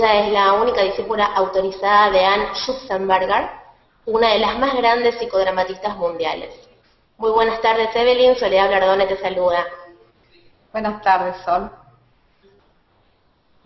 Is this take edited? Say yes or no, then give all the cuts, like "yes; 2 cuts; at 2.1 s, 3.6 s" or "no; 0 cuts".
yes; 1 cut; at 11.0 s